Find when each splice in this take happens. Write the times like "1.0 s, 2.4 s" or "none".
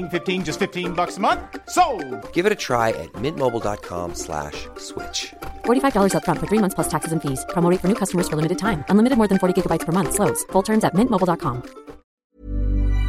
12.1 s